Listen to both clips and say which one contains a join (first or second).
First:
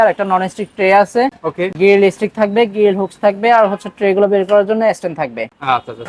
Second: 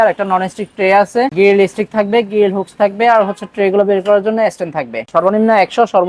second